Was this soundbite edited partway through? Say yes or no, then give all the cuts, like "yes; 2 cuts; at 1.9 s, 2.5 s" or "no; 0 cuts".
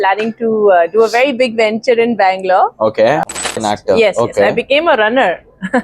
yes; 1 cut; at 3.4 s